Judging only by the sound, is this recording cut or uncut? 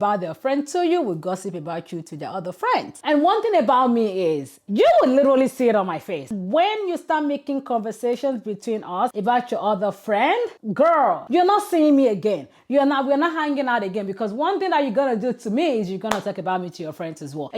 uncut